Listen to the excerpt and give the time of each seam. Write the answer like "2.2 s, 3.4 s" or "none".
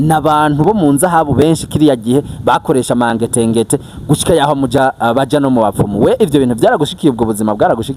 none